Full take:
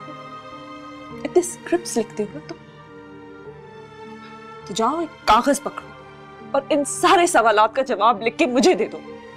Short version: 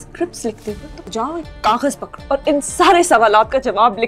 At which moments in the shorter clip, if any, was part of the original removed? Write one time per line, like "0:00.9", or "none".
0:00.9
0:02.1

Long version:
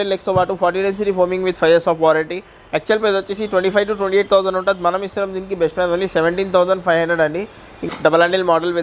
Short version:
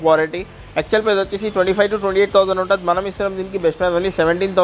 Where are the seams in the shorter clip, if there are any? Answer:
none

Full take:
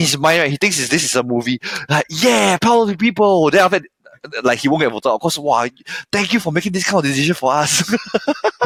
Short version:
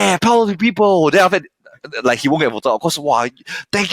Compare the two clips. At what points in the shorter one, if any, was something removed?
none

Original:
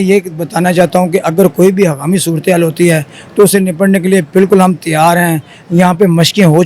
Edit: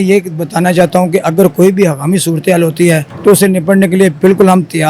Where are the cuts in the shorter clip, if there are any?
0:03.1

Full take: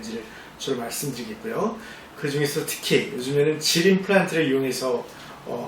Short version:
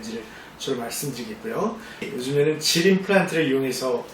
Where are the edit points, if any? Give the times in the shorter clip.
0:02.1

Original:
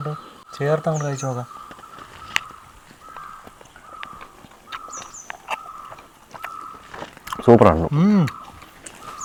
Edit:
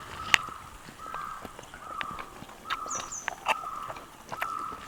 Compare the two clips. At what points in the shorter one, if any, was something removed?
none

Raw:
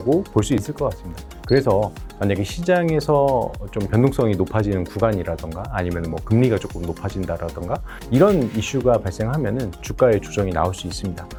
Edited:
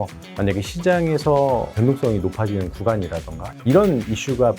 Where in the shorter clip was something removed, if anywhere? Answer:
0:01.7
0:03.5

